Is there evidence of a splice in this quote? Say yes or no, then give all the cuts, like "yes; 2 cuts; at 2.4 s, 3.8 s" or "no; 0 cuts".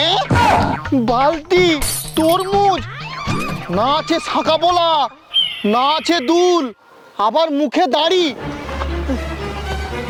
no; 0 cuts